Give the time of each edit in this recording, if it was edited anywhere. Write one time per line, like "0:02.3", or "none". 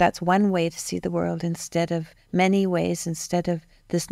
none